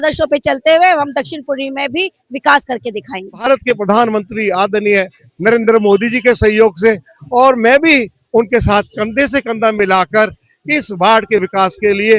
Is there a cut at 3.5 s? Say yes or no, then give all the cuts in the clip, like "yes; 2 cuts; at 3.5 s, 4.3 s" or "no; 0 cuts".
yes; 1 cut; at 3.5 s